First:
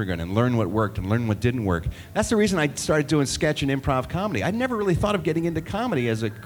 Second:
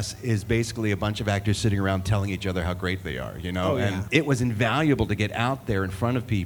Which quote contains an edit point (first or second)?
second